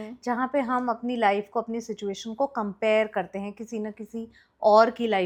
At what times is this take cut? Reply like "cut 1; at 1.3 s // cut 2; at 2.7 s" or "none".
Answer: none